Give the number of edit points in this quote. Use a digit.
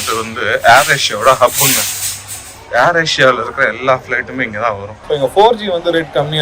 1